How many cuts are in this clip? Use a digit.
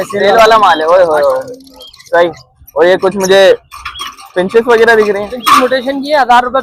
0